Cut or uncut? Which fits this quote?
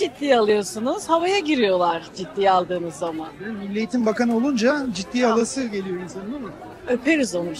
uncut